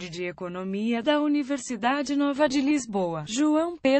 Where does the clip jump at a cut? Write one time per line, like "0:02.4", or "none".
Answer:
0:02.7